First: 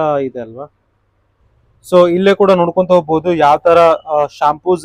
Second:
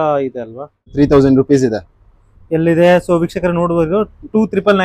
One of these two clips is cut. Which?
second; 1 cut; at 0.9 s

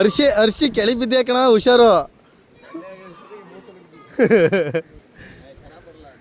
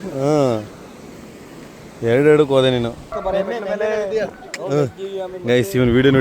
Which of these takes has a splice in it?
second; 1 cut; at 3.1 s

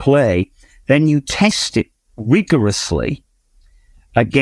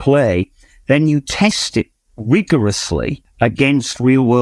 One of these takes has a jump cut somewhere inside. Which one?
second; 1 cut; at 3.2 s

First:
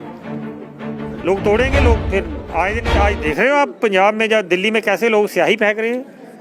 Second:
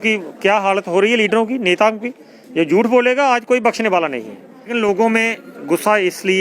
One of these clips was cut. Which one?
second; 1 cut; at 4.7 s

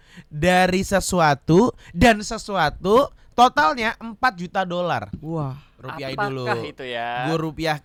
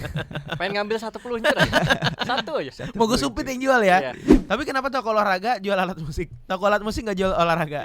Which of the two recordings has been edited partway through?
second; 1 cut; at 4.2 s

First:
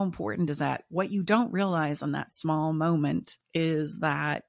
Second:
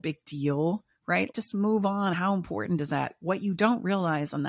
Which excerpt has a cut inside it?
first; 1 cut; at 3.4 s

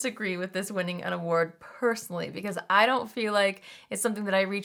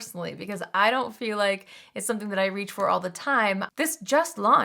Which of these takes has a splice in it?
second; 1 cut; at 3.7 s

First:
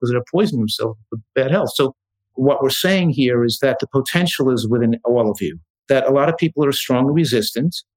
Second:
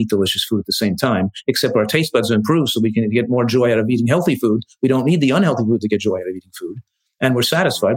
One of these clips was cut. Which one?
first; 4 cuts; at 1.2 s, 2.3 s, 3.6 s, 5.7 s

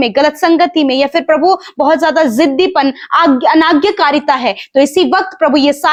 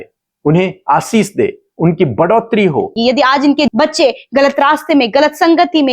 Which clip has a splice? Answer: second; 1 cut; at 2.9 s

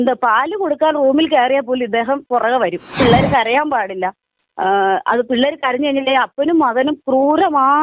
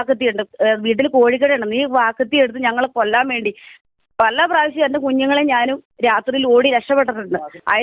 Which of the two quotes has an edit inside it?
first; 1 cut; at 2.9 s

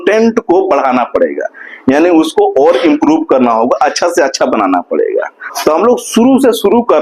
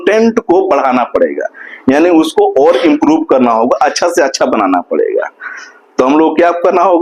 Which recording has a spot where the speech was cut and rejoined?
first; 1 cut; at 5.4 s

